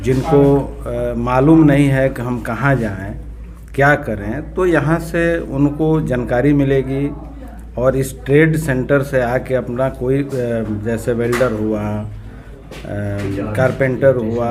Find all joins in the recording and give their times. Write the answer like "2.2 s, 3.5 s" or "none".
none